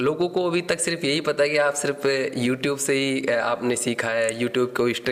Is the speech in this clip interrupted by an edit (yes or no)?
no